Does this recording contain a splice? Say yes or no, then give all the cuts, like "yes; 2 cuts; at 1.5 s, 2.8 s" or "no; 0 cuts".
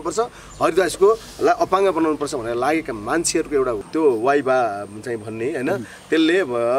yes; 1 cut; at 3.8 s